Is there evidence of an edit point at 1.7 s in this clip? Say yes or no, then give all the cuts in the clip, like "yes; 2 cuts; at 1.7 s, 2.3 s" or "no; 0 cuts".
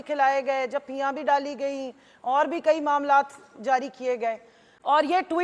no; 1 cut; at 4.6 s